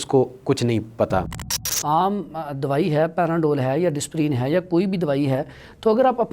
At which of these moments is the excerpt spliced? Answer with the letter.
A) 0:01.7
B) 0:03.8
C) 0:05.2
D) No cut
A